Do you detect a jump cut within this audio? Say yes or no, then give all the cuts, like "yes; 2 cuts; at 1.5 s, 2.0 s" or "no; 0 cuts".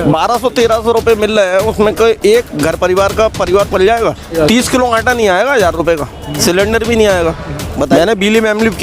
yes; 3 cuts; at 4.3 s, 6.4 s, 7.9 s